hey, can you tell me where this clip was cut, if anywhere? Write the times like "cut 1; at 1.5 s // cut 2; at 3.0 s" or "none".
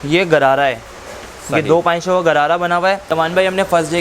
cut 1; at 3.0 s